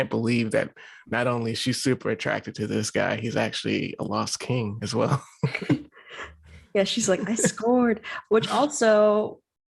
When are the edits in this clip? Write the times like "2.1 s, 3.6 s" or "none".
none